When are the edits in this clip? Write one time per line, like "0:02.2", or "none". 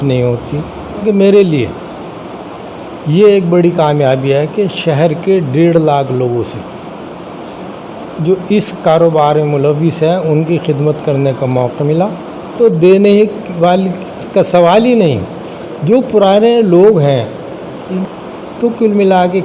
0:01.0
0:12.5
0:17.9